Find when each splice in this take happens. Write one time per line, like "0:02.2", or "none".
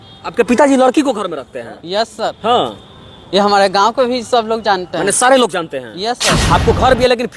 0:06.3